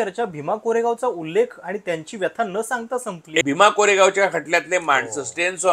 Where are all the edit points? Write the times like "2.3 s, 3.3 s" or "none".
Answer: 3.4 s